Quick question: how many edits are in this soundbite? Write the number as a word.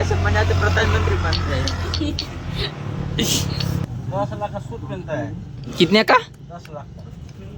one